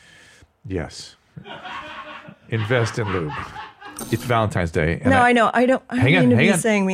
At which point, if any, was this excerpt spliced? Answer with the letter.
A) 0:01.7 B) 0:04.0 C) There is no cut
B